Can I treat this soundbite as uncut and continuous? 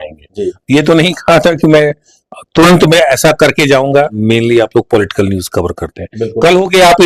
no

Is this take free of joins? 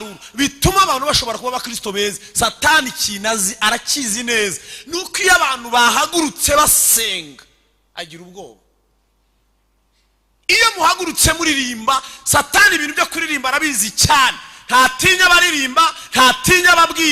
yes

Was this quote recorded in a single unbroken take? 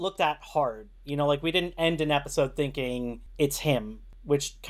yes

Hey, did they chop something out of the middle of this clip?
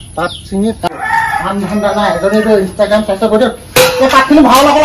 yes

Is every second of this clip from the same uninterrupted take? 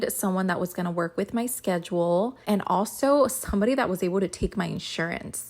no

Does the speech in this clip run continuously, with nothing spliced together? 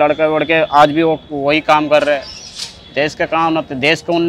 yes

